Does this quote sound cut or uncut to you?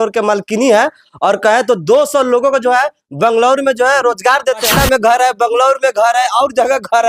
cut